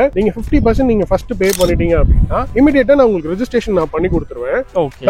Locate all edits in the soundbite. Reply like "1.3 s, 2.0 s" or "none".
none